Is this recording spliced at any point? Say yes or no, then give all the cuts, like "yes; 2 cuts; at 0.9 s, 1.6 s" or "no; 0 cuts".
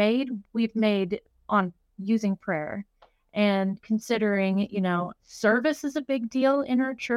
yes; 1 cut; at 5.2 s